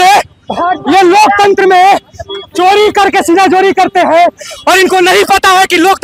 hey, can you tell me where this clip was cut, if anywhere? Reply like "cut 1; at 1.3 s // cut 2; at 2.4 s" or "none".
none

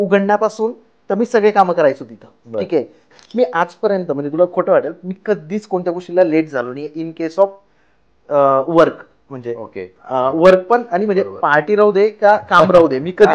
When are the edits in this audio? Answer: cut 1; at 3.2 s

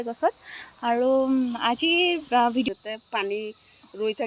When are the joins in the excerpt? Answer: cut 1; at 2.7 s

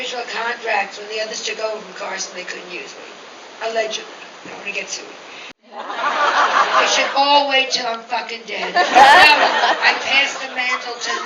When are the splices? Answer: cut 1; at 5.4 s

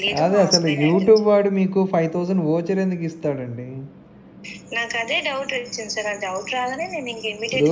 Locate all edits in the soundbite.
none

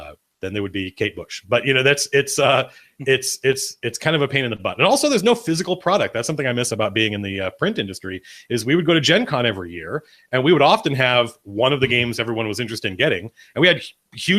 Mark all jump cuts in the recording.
cut 1; at 3.3 s

